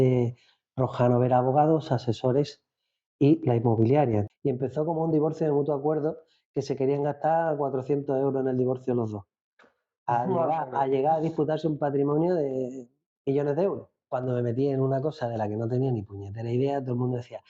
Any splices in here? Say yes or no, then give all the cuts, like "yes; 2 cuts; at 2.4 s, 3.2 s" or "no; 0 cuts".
yes; 2 cuts; at 4.3 s, 13.9 s